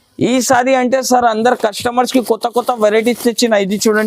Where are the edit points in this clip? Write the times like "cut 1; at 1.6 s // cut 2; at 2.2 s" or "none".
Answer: none